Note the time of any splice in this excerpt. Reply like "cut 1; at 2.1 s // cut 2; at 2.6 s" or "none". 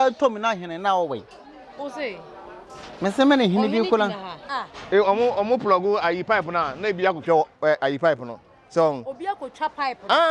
cut 1; at 4.5 s